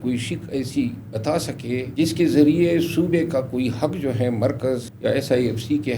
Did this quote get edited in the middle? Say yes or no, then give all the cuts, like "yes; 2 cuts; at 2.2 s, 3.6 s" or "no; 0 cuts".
yes; 2 cuts; at 1.9 s, 4.9 s